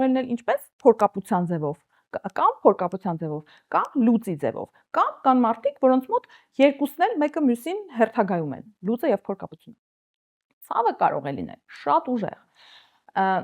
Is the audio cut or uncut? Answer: uncut